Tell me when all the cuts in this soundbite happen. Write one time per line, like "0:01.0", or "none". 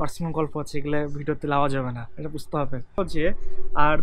0:03.0